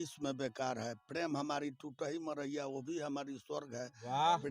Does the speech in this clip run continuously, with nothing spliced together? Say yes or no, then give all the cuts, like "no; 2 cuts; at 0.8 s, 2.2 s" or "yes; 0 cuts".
yes; 0 cuts